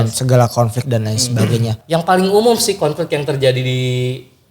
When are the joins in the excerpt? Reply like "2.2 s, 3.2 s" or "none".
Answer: 1.8 s